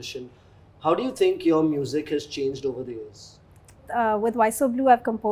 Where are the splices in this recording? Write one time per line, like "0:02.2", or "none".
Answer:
0:03.8